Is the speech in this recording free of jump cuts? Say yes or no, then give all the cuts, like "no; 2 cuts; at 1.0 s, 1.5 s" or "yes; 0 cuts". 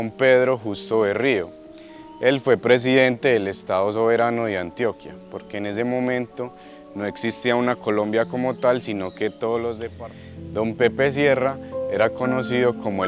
no; 1 cut; at 9.9 s